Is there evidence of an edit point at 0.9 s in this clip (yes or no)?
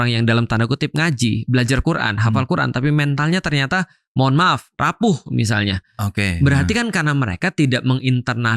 no